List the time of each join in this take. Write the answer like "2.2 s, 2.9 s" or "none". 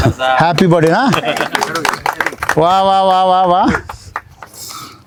none